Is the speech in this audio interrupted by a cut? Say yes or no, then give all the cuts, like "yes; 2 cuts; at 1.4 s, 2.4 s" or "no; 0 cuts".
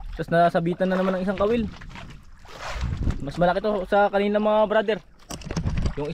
no; 0 cuts